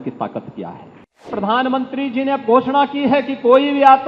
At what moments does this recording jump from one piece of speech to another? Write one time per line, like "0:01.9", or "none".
0:01.3